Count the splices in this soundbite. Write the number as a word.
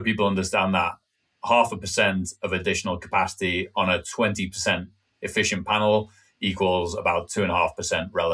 zero